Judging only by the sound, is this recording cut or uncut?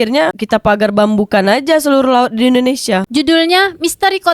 uncut